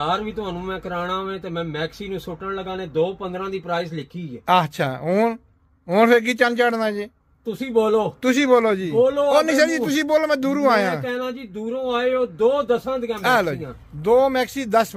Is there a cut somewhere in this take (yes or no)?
no